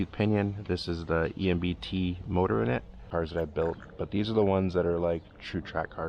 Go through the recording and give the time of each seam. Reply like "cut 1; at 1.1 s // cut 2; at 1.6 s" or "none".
cut 1; at 3.1 s